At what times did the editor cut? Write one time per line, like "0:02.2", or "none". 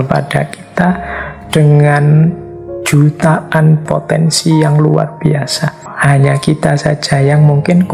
0:03.8
0:05.9

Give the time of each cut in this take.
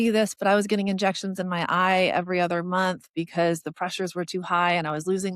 none

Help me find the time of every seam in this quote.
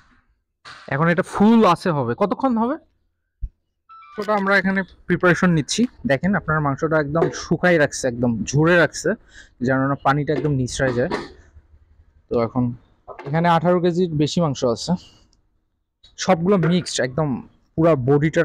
0:04.1

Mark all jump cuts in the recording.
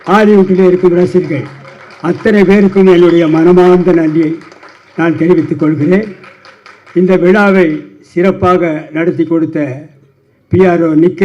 none

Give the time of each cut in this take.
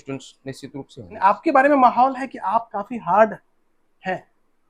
0:01.2

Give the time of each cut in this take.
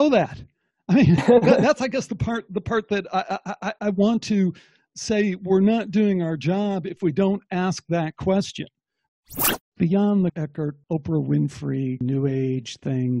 0:09.0
0:10.4
0:12.0

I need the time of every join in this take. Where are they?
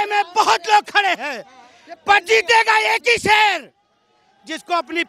none

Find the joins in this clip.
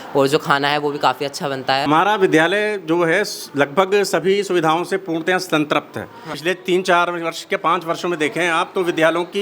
0:01.9
0:06.3

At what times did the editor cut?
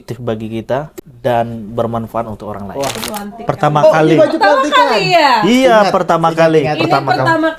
0:01.0
0:03.0

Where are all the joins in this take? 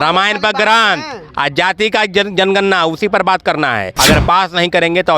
0:03.9

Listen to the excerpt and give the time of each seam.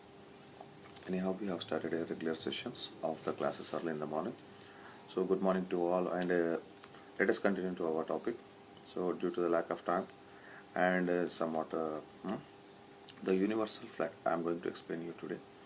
0:03.7

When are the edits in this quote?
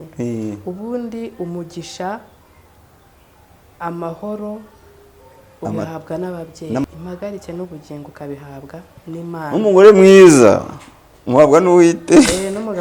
0:06.8

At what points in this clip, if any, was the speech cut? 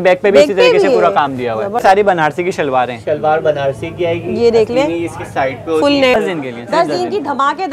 0:01.8
0:06.1

